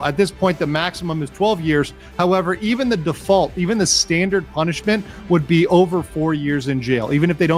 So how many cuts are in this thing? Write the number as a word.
zero